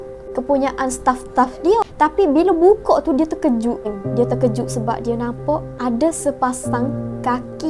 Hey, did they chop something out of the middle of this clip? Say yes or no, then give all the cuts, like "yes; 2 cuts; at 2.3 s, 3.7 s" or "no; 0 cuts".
yes; 3 cuts; at 1.9 s, 4.0 s, 5.7 s